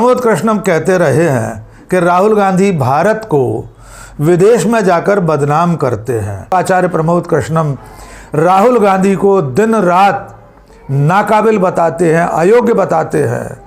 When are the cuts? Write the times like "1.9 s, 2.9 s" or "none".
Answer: 6.5 s